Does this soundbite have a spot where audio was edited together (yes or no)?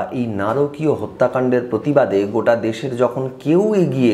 no